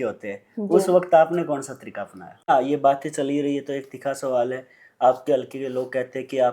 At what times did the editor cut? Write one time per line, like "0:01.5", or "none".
0:02.5